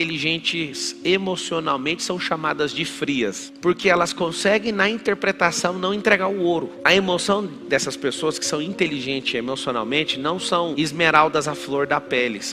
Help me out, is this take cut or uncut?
cut